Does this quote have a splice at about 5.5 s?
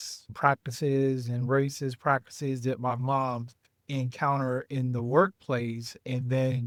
no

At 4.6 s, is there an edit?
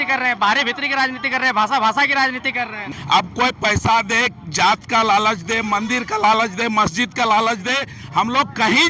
no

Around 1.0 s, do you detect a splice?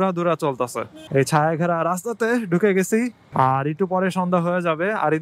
yes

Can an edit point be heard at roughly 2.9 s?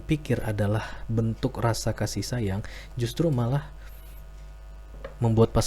no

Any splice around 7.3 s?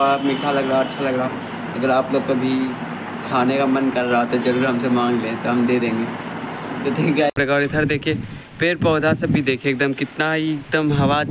yes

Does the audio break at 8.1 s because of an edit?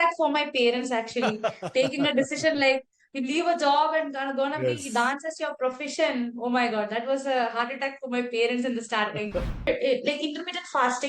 no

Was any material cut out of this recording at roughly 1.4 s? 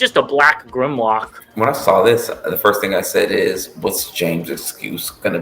yes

